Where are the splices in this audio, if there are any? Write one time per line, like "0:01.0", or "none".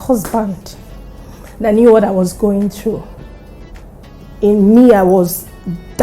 0:04.3